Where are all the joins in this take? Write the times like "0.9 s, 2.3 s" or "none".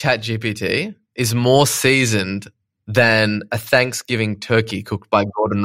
none